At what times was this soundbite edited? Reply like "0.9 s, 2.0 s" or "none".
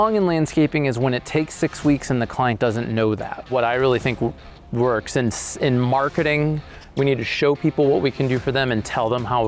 3.3 s